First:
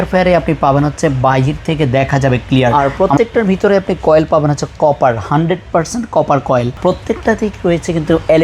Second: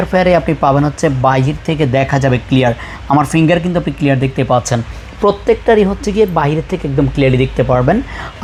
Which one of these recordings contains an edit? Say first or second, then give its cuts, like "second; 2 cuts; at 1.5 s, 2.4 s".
first; 2 cuts; at 2.7 s, 6.8 s